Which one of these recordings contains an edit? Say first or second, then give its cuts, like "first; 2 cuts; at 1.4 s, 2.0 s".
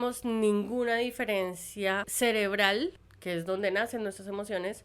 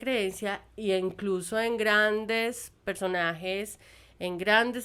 first; 2 cuts; at 2.1 s, 3.1 s